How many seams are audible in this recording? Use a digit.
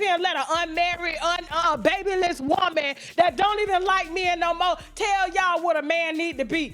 1